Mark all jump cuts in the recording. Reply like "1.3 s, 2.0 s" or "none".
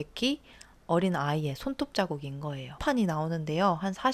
2.8 s